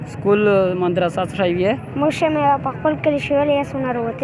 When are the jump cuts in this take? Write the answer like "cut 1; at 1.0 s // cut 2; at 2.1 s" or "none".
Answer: none